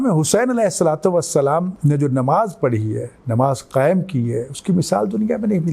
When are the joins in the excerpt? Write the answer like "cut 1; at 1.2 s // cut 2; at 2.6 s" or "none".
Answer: cut 1; at 1.7 s